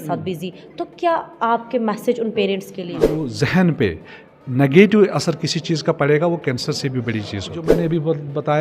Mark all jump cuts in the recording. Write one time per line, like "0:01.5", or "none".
0:03.2
0:07.6